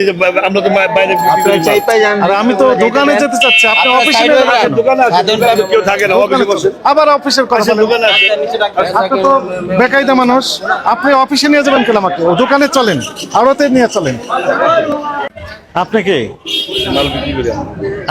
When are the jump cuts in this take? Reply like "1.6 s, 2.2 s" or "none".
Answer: 15.3 s